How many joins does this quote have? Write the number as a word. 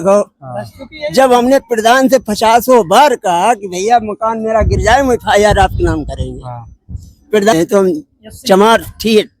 one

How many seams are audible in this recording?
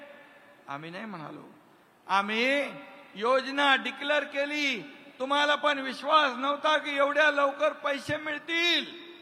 zero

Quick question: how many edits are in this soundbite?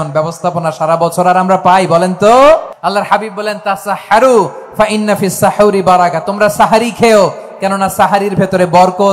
one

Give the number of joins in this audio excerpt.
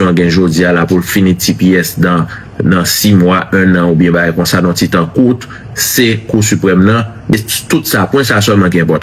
one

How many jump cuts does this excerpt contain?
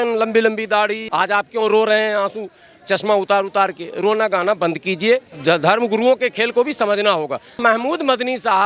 three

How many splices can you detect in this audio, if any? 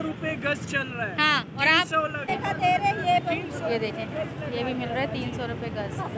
one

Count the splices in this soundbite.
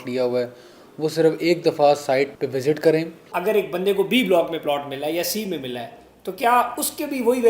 two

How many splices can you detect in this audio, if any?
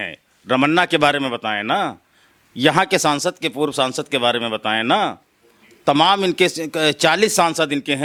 zero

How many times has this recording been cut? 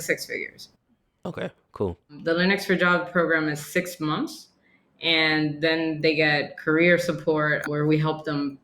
two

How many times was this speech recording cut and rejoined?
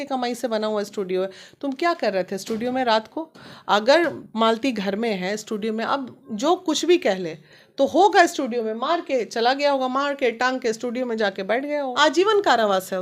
one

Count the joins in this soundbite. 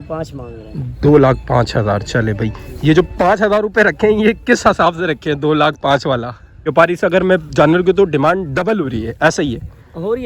one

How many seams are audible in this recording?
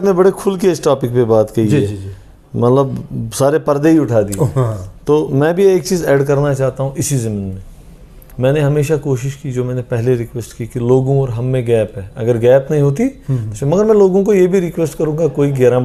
zero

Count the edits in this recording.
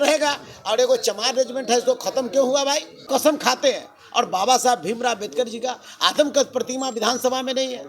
one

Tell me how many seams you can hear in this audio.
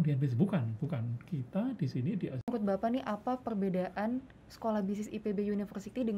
one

